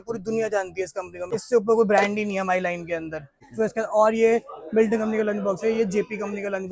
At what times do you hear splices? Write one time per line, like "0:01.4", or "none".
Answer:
0:01.3
0:03.1